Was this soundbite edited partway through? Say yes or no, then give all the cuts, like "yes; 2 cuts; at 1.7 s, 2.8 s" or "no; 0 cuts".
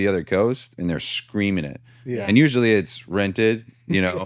no; 0 cuts